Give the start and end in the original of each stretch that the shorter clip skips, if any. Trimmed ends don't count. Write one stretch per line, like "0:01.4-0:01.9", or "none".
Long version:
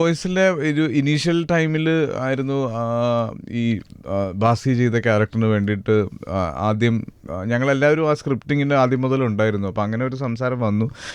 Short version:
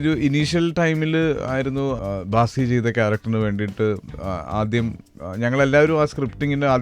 0:02.7-0:04.1